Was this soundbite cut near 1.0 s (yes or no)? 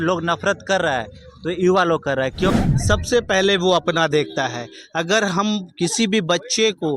no